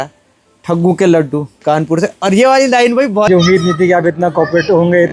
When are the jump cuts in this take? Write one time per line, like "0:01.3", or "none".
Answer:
0:03.3